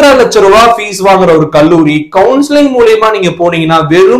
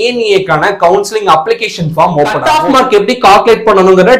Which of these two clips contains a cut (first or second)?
second